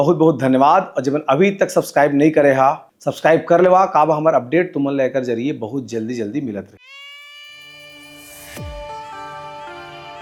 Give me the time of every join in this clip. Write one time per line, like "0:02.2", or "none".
none

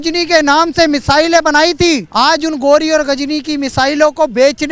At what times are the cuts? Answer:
0:02.1

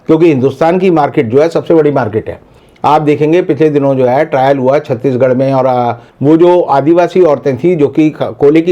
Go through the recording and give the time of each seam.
0:02.5

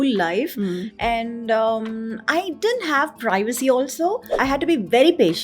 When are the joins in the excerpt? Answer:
0:04.4

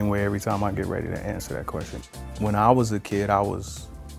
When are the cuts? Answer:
0:02.0

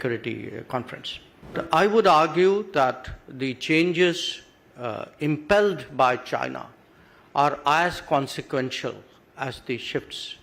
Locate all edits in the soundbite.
0:01.5

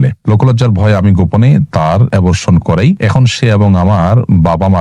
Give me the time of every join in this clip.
0:02.1
0:03.0

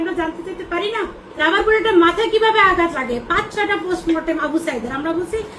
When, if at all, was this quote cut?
0:01.2

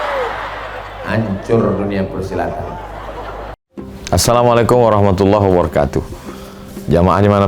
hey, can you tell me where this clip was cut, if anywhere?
0:03.6

